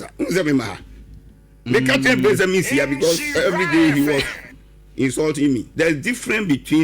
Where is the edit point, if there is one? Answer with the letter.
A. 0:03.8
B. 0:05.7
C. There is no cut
B